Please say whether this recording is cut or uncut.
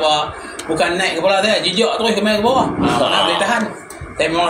uncut